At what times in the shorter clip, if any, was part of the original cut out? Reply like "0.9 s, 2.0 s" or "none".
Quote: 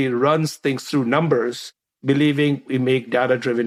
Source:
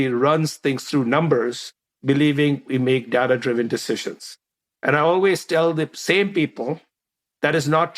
none